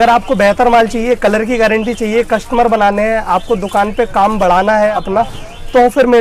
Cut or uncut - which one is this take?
cut